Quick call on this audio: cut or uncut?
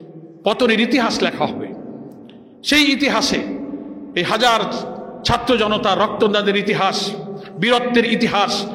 uncut